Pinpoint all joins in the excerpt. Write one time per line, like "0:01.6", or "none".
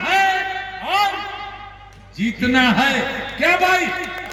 none